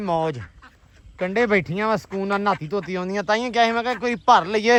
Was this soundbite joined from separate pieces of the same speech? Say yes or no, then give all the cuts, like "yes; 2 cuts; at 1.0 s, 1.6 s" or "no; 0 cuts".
no; 0 cuts